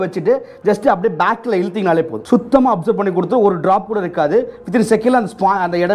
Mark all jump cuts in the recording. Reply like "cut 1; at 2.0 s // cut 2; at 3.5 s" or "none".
cut 1; at 2.2 s